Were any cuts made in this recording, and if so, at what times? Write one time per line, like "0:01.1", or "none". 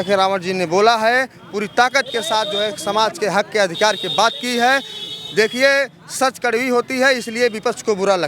none